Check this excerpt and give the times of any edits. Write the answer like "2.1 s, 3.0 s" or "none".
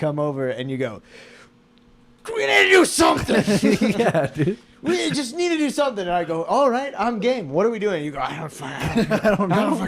none